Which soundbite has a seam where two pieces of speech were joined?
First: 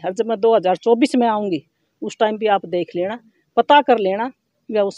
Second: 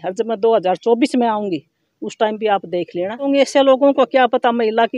second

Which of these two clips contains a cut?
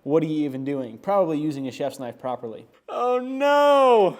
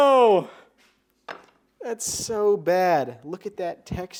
first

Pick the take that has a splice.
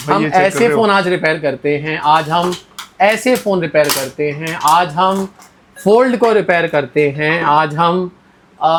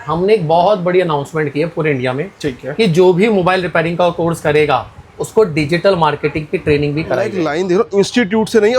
second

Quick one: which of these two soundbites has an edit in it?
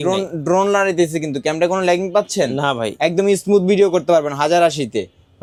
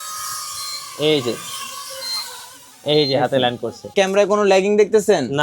second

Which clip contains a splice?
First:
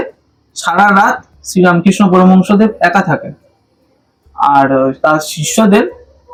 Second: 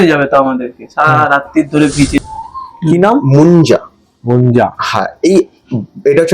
second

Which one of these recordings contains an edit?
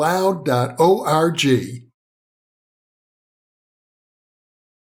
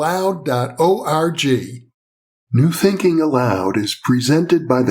second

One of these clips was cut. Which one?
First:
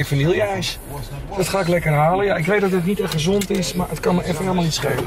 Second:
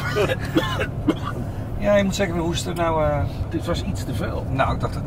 second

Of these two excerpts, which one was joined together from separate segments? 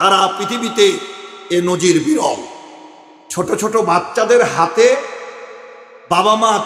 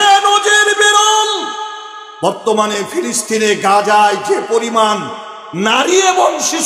first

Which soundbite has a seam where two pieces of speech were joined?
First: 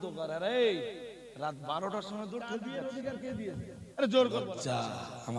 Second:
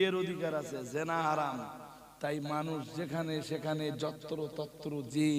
first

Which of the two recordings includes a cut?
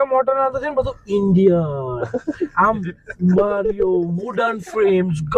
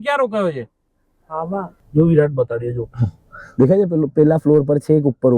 second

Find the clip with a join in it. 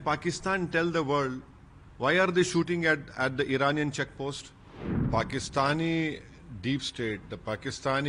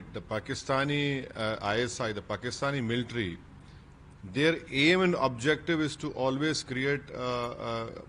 first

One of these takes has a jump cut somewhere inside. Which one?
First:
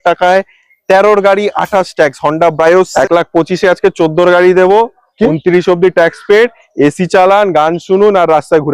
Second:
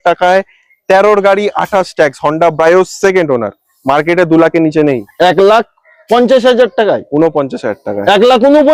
first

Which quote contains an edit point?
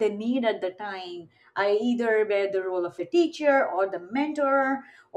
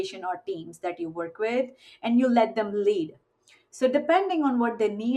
first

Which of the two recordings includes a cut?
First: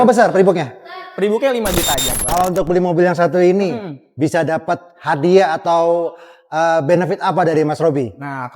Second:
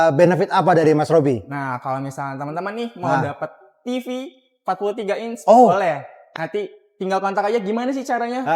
first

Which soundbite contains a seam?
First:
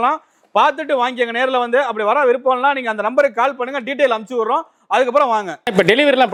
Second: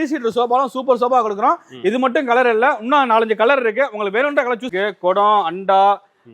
second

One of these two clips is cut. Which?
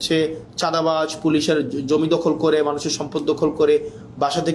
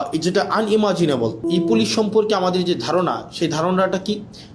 second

